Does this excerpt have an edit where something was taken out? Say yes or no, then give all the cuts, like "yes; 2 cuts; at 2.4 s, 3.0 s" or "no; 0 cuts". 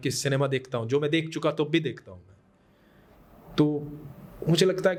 no; 0 cuts